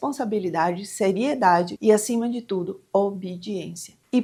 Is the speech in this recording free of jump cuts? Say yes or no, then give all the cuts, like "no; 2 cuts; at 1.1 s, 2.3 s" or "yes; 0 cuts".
yes; 0 cuts